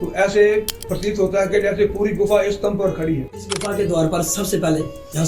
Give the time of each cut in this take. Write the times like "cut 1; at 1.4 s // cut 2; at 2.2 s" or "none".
cut 1; at 3.6 s